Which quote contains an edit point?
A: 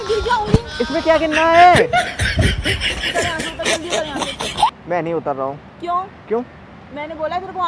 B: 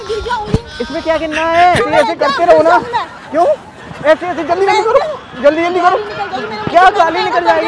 B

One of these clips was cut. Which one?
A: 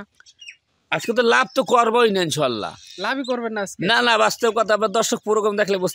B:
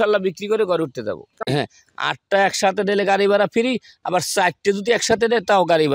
B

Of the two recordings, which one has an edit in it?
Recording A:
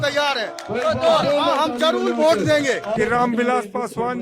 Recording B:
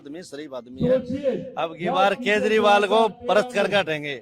A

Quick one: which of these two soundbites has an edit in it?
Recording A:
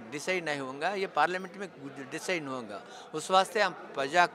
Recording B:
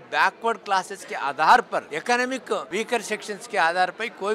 B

